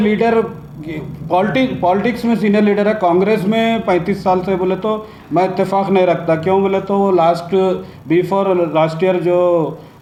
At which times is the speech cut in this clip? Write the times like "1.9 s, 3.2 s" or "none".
none